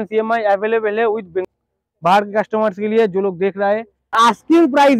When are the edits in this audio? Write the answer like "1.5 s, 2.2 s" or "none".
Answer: 1.5 s, 3.5 s